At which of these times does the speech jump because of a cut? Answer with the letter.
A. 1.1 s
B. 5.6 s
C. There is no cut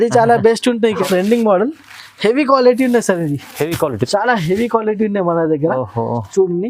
A